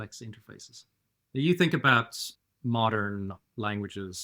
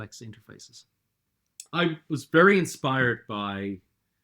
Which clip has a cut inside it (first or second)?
second